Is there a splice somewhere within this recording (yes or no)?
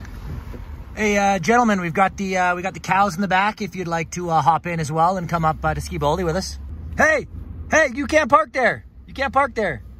no